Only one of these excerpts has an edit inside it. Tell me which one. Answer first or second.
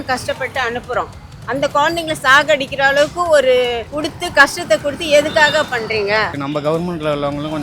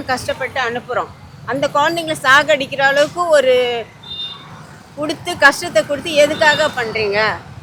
first